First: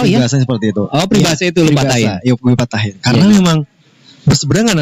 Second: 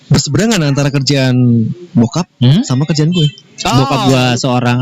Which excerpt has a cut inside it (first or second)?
second